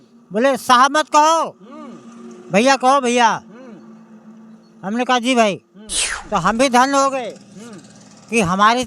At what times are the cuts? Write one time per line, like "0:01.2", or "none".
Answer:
0:06.1